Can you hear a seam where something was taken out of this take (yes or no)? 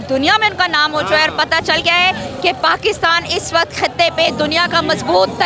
no